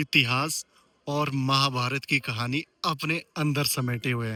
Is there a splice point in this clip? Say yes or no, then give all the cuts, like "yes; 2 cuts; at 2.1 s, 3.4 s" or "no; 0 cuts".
no; 0 cuts